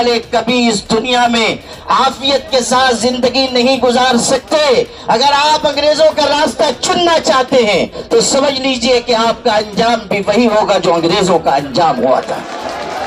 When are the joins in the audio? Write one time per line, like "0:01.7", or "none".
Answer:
none